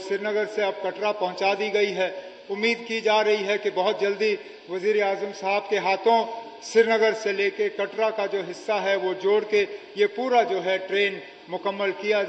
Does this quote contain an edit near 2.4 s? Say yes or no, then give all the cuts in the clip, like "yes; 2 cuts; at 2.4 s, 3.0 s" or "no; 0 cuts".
no; 0 cuts